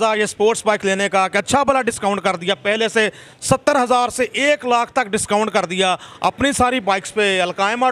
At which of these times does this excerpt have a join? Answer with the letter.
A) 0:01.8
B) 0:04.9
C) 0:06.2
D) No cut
D